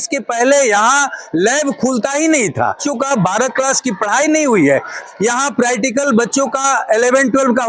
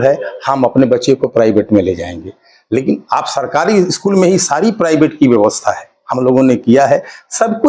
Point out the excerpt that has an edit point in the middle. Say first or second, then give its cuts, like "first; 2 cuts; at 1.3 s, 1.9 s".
first; 2 cuts; at 2.8 s, 5.0 s